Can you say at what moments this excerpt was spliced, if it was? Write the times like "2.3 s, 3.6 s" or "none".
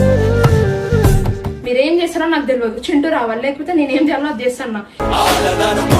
1.4 s